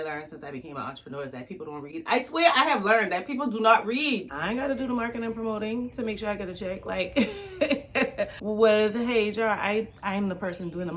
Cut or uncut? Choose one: cut